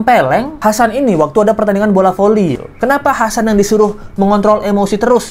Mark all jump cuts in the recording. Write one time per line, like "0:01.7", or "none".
0:02.6